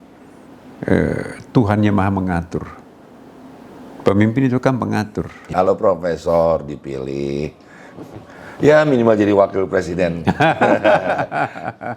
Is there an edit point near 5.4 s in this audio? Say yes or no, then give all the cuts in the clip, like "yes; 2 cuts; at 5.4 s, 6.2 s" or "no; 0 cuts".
yes; 1 cut; at 5.4 s